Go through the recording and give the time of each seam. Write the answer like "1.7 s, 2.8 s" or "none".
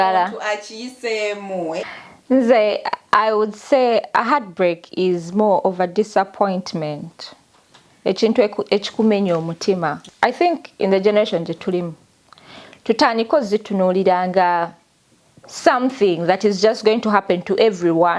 1.9 s, 10.0 s